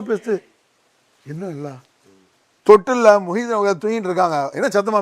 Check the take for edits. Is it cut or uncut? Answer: uncut